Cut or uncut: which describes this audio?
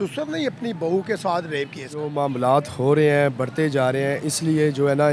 cut